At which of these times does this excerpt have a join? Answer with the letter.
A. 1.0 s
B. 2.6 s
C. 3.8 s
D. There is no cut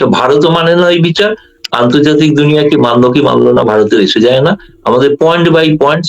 D